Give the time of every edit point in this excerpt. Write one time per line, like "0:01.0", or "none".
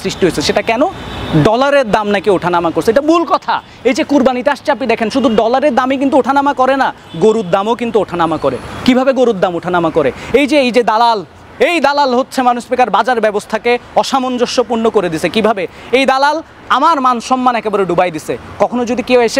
none